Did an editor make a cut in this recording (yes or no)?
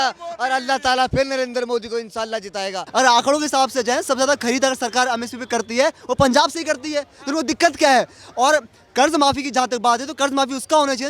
yes